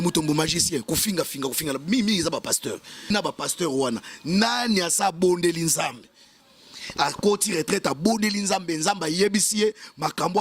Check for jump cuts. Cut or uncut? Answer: cut